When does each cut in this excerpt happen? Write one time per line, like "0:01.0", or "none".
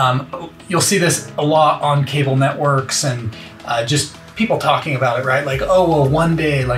none